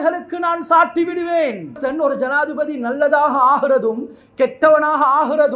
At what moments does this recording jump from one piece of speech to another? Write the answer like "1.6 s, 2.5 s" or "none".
1.8 s